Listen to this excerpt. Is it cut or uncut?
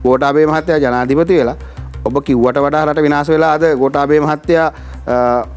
uncut